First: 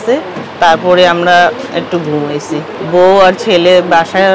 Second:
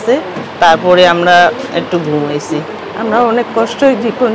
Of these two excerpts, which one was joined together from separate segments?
second; 1 cut; at 2.7 s

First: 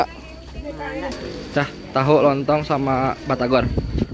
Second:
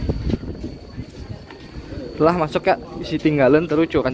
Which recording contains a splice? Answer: first; 1 cut; at 1.3 s

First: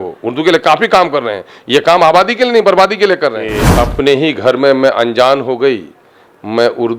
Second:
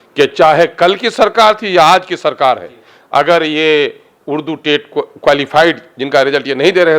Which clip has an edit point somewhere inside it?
first; 1 cut; at 3.7 s

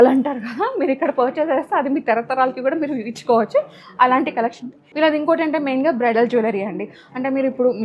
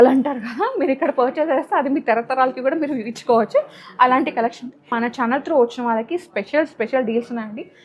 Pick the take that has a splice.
second; 1 cut; at 4.9 s

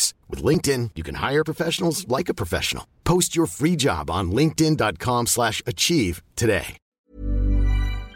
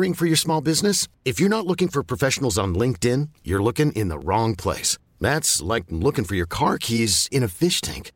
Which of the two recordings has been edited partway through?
first; 1 cut; at 7.1 s

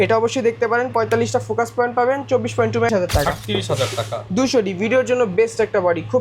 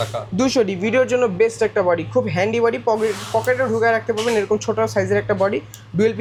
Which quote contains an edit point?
first; 1 cut; at 2.9 s

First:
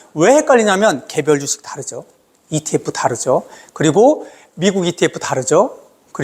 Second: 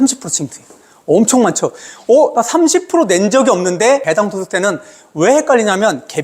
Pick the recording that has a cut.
second; 1 cut; at 4.0 s

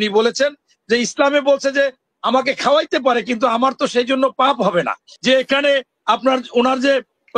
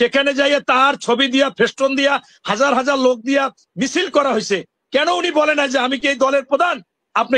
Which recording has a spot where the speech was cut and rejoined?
first; 1 cut; at 5.0 s

